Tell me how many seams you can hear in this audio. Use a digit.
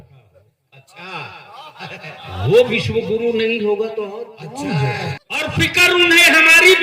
1